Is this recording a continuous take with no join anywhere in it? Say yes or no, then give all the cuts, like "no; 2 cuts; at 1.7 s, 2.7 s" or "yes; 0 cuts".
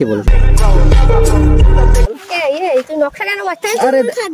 yes; 0 cuts